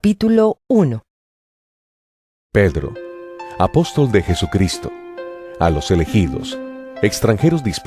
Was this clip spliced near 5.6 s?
no; 0 cuts

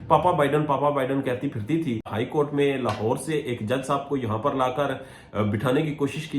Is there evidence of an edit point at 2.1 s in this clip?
yes; 1 cut; at 2.1 s

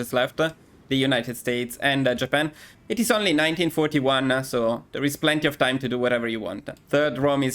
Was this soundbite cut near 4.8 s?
no; 2 cuts; at 2.7 s, 6.8 s

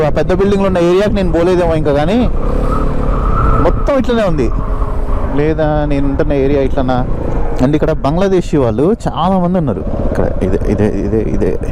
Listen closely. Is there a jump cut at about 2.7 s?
no; 0 cuts

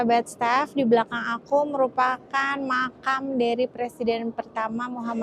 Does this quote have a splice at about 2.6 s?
no; 0 cuts

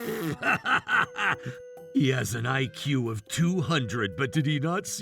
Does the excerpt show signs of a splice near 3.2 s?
no; 1 cut; at 1.6 s

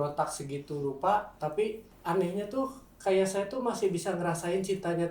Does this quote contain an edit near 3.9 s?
no; 1 cut; at 1.9 s

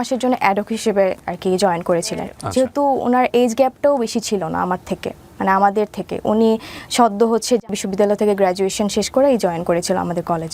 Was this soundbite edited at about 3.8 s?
no; 2 cuts; at 2.4 s, 7.8 s

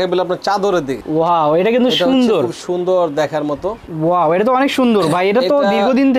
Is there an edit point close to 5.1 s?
no; 2 cuts; at 1.0 s, 3.8 s

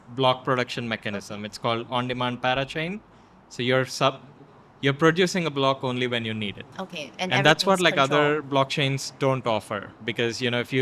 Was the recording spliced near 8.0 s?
no; 1 cut; at 6.6 s

